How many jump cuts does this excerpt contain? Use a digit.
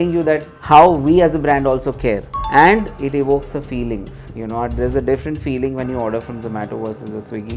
0